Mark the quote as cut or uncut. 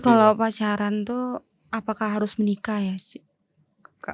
uncut